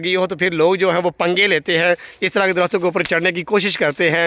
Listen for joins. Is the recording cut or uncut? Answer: uncut